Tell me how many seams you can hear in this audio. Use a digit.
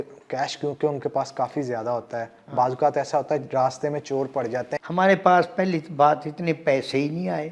1